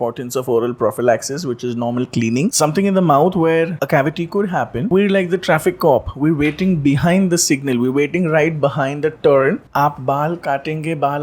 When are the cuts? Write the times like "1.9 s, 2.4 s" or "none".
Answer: 2.5 s, 3.7 s, 4.9 s, 9.6 s